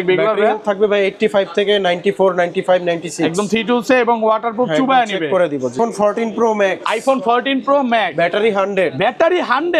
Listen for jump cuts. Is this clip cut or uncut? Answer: cut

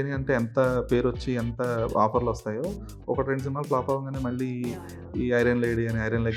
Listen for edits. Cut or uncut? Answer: uncut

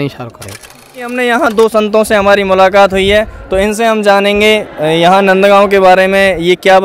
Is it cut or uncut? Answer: cut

